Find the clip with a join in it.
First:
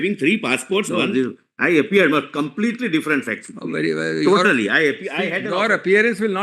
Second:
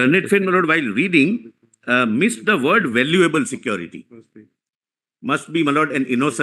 first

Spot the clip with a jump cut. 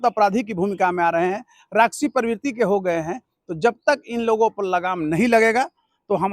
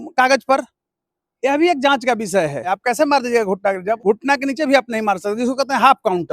second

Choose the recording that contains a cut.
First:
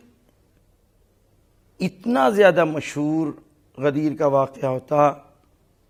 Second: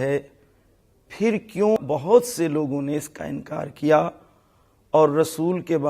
second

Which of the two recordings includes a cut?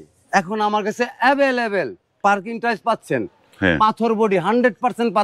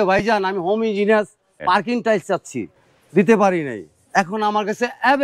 second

